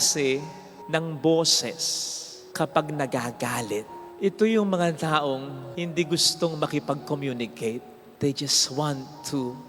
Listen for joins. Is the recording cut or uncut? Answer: uncut